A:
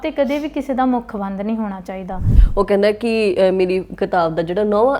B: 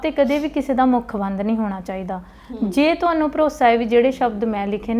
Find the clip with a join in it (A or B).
A